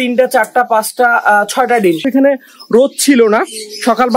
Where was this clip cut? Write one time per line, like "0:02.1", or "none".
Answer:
0:02.1